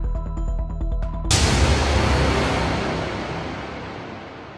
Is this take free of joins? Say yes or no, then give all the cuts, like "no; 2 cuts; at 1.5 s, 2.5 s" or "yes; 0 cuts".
no; 1 cut; at 1.3 s